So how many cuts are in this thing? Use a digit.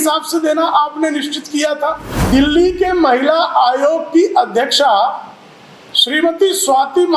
1